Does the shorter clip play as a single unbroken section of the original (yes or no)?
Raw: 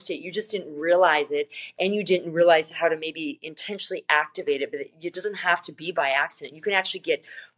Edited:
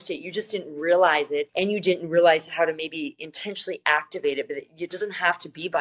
no